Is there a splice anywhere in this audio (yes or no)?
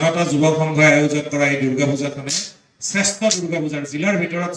no